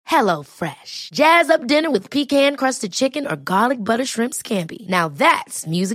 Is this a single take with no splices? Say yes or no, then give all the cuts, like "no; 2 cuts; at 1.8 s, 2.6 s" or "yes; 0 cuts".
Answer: yes; 0 cuts